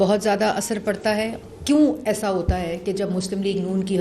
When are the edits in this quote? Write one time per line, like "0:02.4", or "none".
0:01.4